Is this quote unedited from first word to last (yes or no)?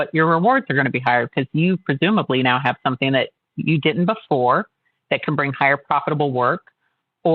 no